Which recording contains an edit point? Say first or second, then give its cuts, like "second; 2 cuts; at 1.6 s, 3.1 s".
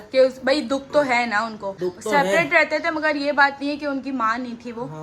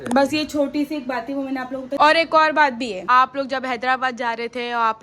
second; 2 cuts; at 1.9 s, 3.0 s